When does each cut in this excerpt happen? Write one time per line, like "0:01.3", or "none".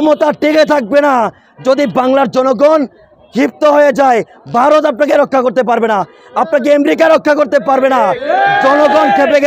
none